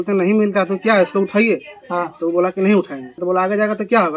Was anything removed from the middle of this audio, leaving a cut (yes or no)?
yes